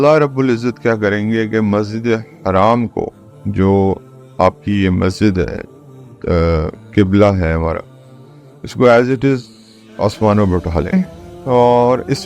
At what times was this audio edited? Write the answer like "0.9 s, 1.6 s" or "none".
10.9 s